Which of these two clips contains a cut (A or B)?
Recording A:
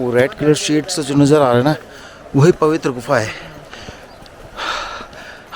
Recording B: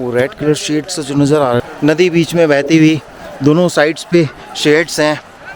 B